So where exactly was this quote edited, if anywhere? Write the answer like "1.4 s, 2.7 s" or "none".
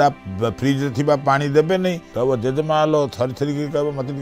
2.1 s